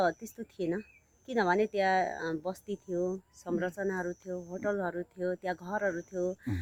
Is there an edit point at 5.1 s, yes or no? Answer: no